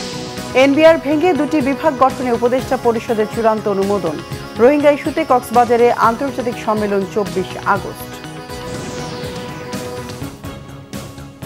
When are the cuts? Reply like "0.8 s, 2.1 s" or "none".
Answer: 10.4 s